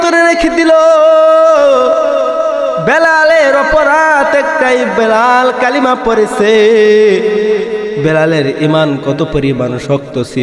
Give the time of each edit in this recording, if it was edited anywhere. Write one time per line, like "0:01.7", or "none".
none